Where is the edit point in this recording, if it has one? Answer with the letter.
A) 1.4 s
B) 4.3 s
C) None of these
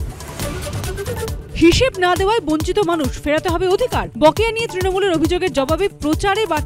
A